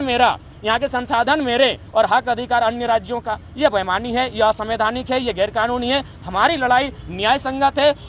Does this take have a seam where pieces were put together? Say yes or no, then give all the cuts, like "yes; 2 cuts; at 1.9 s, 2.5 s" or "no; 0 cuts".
no; 0 cuts